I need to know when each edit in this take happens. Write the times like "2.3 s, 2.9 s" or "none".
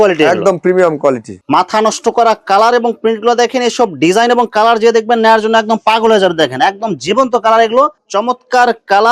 1.3 s, 7.9 s